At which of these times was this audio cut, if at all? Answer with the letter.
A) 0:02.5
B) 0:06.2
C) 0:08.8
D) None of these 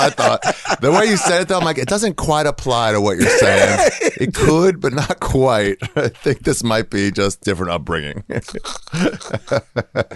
D